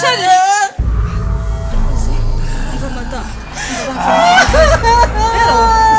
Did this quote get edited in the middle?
no; 0 cuts

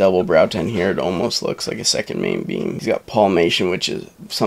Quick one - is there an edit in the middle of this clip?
yes; 1 cut; at 2.8 s

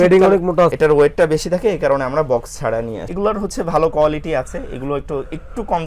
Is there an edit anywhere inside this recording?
yes; 2 cuts; at 0.7 s, 2.9 s

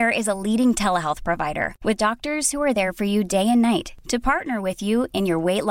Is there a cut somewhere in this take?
no; 0 cuts

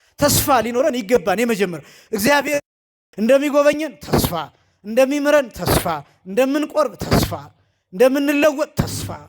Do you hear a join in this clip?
yes; 1 cut; at 2.6 s

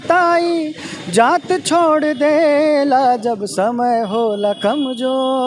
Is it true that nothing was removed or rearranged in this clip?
yes; 0 cuts

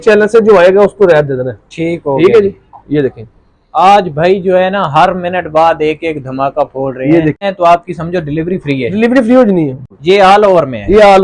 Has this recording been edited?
yes; 2 cuts; at 7.4 s, 9.8 s

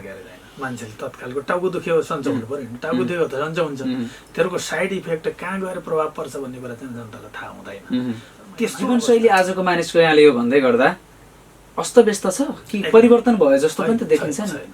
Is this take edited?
yes; 1 cut; at 8.8 s

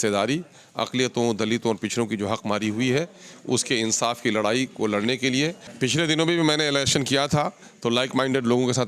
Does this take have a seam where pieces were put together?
yes; 1 cut; at 5.7 s

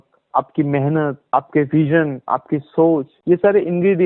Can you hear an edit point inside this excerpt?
yes; 2 cuts; at 1.2 s, 3.1 s

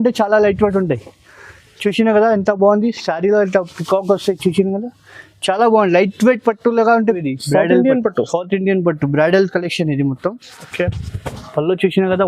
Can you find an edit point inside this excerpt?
yes; 1 cut; at 7.2 s

